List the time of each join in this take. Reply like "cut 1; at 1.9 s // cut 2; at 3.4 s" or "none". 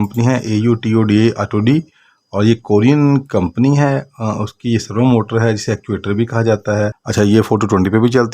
cut 1; at 7.0 s